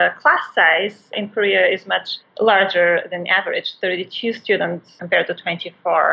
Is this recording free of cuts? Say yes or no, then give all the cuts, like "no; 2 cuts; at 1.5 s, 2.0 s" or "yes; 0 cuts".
no; 2 cuts; at 1.1 s, 5.0 s